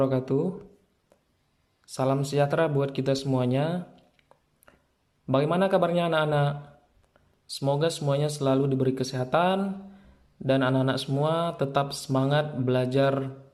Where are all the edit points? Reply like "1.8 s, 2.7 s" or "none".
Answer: none